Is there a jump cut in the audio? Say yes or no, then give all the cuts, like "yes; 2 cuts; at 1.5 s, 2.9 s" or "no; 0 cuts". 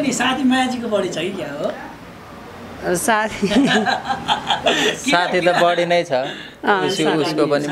no; 0 cuts